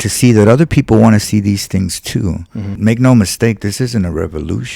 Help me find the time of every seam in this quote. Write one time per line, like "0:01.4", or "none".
0:02.7